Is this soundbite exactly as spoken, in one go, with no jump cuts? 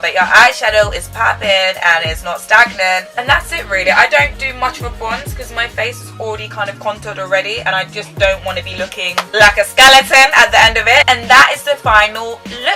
no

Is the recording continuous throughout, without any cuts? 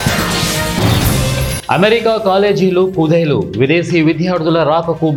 yes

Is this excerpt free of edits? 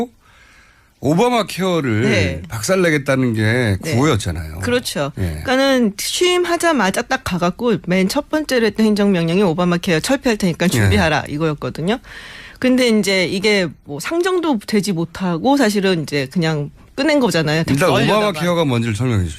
no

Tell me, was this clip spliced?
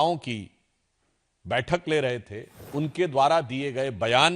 yes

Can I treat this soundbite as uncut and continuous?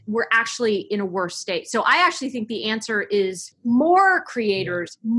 no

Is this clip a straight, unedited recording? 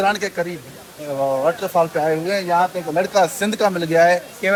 yes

